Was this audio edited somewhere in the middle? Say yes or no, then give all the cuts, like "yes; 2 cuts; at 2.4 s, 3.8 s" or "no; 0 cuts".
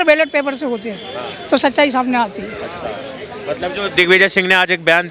no; 0 cuts